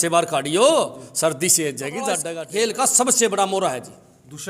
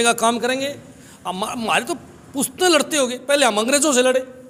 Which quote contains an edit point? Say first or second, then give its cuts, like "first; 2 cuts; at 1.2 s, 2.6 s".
first; 1 cut; at 2.3 s